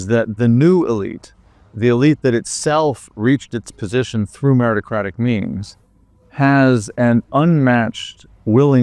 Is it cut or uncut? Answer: uncut